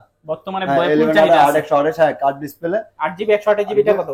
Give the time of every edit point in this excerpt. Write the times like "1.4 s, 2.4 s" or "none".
none